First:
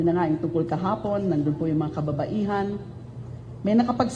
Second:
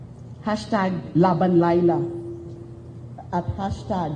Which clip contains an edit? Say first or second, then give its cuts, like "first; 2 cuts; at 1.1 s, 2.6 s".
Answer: first; 1 cut; at 2.7 s